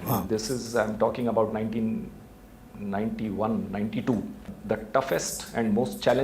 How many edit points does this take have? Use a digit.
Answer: 1